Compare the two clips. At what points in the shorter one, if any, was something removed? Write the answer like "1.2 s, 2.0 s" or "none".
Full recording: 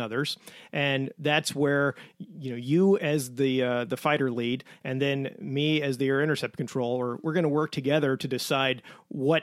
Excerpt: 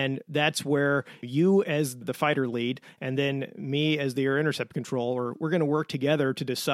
1.2 s, 2.0 s